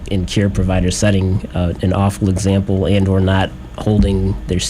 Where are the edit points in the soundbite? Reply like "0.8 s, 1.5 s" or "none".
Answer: none